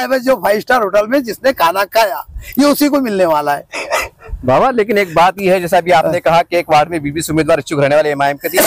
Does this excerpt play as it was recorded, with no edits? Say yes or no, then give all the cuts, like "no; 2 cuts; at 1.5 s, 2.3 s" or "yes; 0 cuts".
yes; 0 cuts